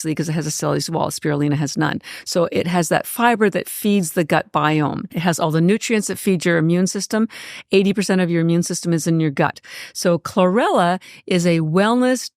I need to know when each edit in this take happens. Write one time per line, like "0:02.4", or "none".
0:05.0